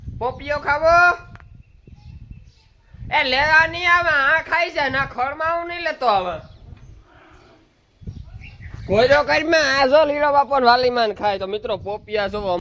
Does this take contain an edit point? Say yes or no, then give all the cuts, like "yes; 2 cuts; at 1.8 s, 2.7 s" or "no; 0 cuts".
no; 0 cuts